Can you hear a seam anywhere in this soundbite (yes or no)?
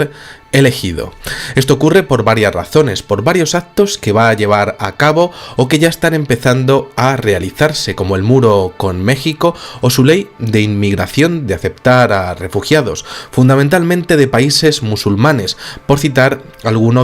yes